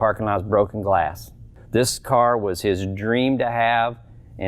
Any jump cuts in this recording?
yes; 1 cut; at 1.6 s

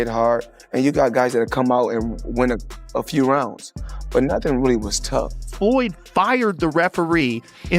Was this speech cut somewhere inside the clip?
yes; 1 cut; at 5.4 s

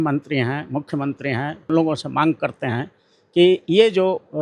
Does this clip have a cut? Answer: yes; 1 cut; at 1.7 s

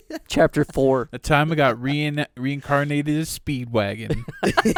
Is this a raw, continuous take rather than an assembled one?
yes; 0 cuts

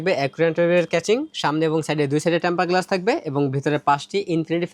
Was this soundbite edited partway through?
no; 0 cuts

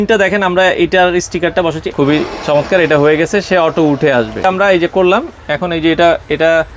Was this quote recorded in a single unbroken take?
no; 2 cuts; at 1.9 s, 4.4 s

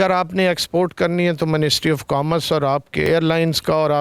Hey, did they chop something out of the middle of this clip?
yes; 1 cut; at 3.1 s

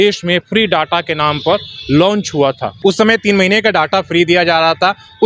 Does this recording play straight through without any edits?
no; 1 cut; at 2.7 s

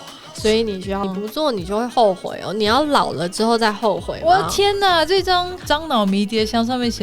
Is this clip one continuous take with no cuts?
no; 2 cuts; at 1.0 s, 5.6 s

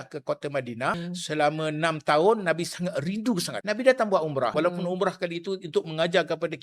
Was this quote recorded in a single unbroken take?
no; 3 cuts; at 1.0 s, 3.5 s, 4.5 s

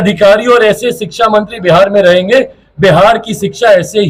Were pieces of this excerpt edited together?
no; 0 cuts

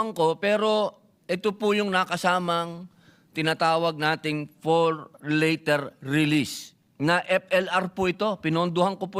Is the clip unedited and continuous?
yes; 0 cuts

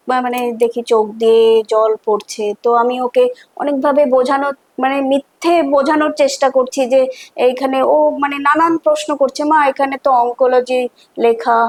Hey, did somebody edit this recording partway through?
no; 0 cuts

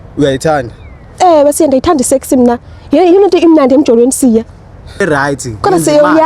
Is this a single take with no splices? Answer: no; 1 cut; at 5.0 s

